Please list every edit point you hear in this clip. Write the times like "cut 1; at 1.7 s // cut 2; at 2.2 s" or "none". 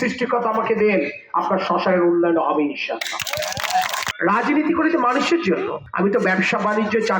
cut 1; at 4.0 s // cut 2; at 5.8 s